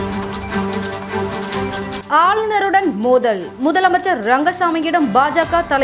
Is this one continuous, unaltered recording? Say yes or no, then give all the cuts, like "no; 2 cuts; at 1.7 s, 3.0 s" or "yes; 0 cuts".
yes; 0 cuts